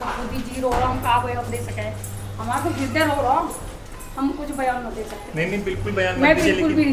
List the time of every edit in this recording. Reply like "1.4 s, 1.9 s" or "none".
none